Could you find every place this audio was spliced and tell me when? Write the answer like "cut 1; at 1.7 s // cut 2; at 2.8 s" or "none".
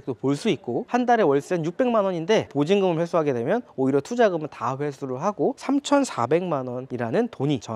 cut 1; at 2.5 s